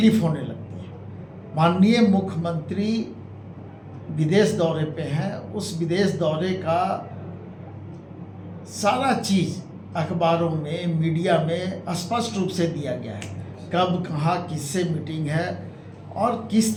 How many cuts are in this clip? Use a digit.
0